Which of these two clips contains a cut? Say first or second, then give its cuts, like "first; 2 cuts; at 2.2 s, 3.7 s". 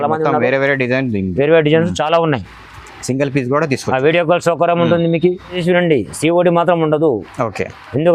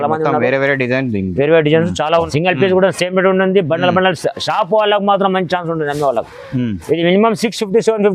second; 1 cut; at 2.3 s